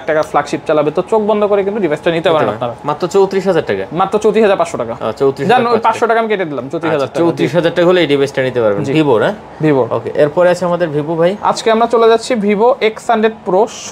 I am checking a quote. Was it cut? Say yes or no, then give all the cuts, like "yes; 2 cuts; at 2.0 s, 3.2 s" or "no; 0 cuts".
no; 0 cuts